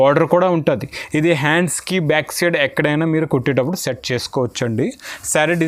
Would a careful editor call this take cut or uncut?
uncut